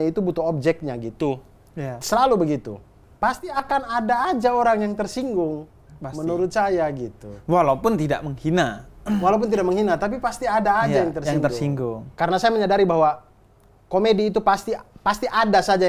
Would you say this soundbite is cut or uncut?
cut